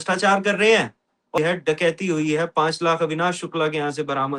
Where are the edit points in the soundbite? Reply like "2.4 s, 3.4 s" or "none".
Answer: 1.4 s